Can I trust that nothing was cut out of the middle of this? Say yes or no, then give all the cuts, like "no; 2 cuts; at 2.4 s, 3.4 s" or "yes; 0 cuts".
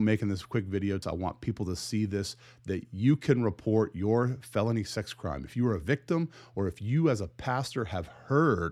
no; 1 cut; at 1.0 s